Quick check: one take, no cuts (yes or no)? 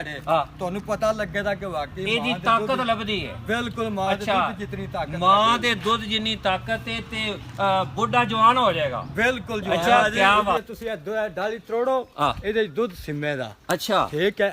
no